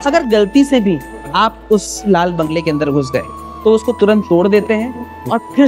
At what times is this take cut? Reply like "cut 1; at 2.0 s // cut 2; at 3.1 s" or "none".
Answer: none